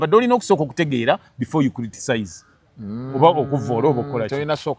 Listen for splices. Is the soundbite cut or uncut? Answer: uncut